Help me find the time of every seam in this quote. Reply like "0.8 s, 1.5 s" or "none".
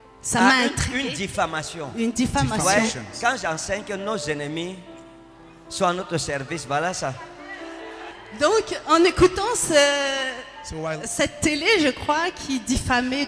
8.1 s